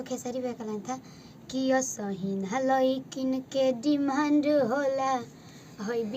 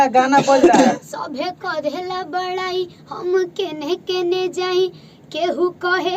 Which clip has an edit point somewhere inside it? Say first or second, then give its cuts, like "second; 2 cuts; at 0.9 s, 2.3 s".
second; 1 cut; at 1.1 s